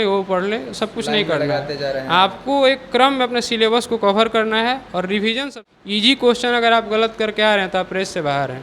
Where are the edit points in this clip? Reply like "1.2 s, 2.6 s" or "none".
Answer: 5.6 s